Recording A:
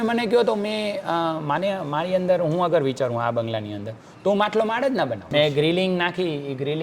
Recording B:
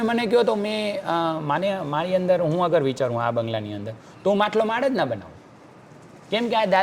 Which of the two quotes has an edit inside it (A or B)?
A